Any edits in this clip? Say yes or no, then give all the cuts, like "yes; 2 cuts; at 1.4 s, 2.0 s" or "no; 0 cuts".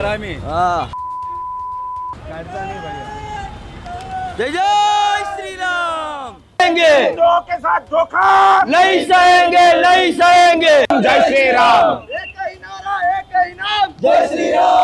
no; 0 cuts